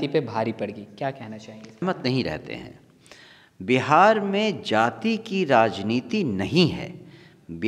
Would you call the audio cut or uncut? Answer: cut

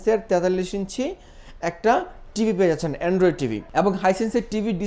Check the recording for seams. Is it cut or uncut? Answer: uncut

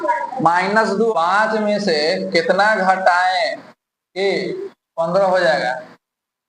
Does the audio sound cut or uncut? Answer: cut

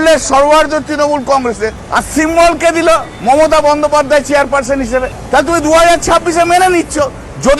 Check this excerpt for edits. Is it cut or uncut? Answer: cut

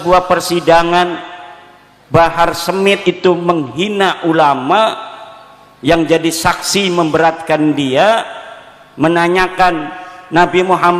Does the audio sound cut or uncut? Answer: cut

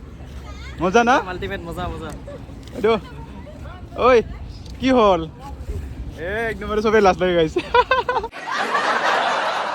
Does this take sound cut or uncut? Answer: cut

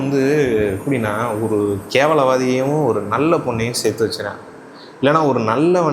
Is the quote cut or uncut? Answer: cut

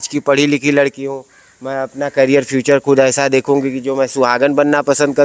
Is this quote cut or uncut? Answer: uncut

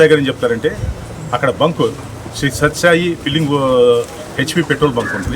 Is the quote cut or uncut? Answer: cut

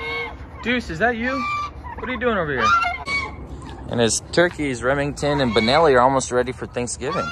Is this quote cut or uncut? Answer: uncut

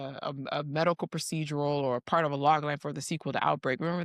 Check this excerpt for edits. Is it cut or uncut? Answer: uncut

